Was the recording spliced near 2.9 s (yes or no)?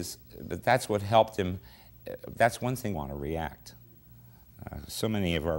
no